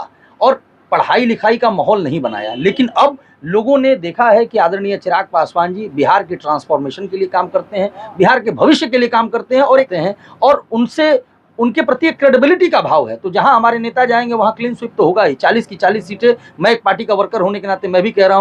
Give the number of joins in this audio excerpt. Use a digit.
1